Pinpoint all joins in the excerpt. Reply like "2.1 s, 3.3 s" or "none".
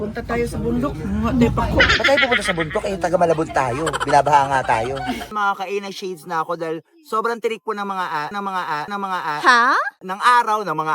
5.3 s